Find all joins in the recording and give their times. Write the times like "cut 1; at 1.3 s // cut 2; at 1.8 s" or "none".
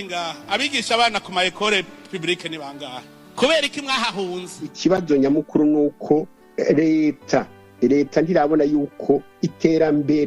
cut 1; at 4.7 s